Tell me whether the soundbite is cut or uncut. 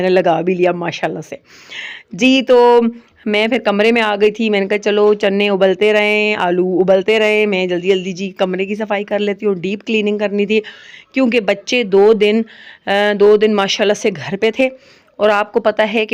uncut